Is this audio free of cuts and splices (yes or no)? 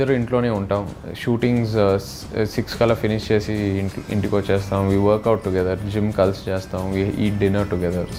yes